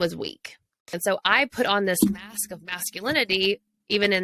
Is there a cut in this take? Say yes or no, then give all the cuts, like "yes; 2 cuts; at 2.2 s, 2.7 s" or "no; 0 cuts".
yes; 1 cut; at 0.9 s